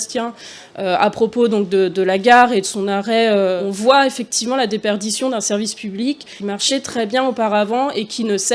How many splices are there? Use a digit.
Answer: 2